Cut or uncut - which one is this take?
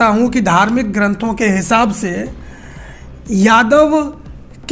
uncut